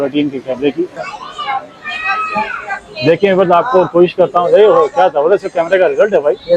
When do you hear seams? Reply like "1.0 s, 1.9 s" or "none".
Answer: 1.0 s